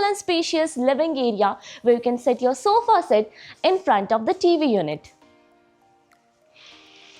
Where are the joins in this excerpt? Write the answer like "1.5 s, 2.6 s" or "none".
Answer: none